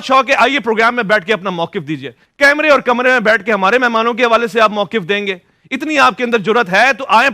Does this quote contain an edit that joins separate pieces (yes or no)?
no